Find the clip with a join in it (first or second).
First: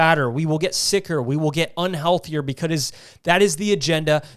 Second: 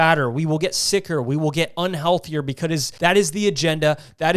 second